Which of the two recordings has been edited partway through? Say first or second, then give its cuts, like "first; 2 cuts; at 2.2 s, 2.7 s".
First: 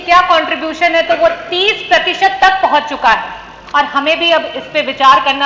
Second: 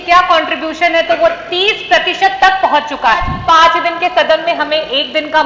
second; 1 cut; at 3.3 s